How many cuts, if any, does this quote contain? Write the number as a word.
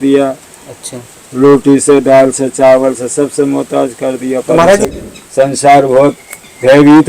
one